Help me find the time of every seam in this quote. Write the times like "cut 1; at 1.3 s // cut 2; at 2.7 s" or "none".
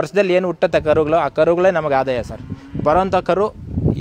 none